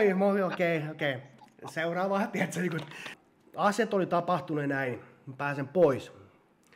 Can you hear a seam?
yes; 1 cut; at 3.1 s

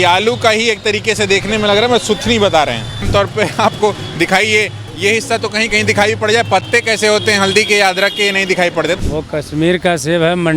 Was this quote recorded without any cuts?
no; 2 cuts; at 3.0 s, 9.0 s

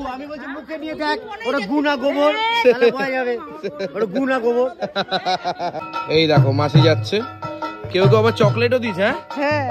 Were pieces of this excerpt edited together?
yes; 1 cut; at 5.8 s

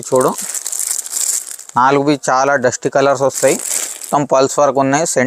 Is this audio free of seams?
no; 1 cut; at 4.0 s

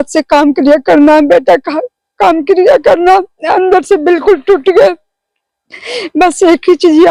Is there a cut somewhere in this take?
no; 0 cuts

